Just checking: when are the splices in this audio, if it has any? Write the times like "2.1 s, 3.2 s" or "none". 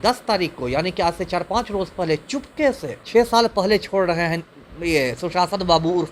3.0 s